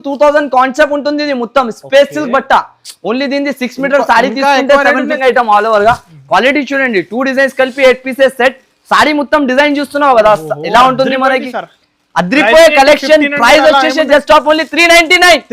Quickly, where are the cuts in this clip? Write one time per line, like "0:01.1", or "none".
0:05.1